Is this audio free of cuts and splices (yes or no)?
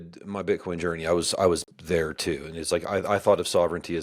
yes